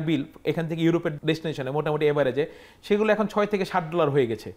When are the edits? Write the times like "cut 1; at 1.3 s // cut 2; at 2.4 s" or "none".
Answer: cut 1; at 1.2 s

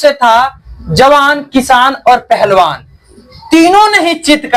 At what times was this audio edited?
none

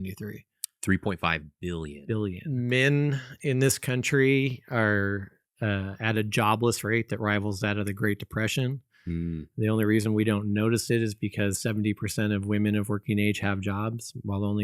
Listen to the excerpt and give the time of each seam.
cut 1; at 2.4 s

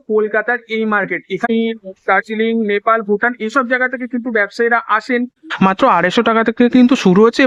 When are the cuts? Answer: cut 1; at 1.4 s // cut 2; at 5.4 s

